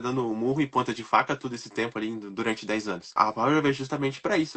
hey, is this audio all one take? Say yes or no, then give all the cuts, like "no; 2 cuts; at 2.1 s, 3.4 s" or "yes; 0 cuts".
no; 1 cut; at 3.2 s